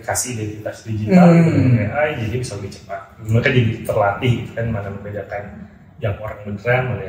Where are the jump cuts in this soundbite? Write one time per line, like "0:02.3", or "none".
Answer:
none

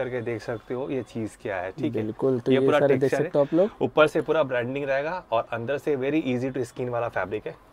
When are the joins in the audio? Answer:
none

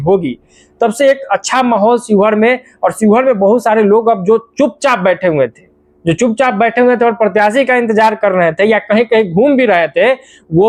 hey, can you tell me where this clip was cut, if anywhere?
none

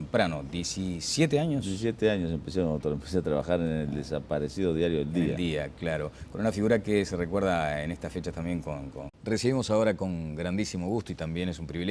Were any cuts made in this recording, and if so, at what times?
none

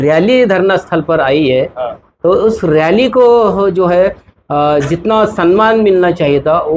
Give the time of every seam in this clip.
none

